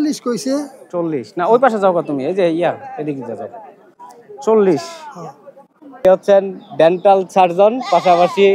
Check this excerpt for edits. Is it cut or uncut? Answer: cut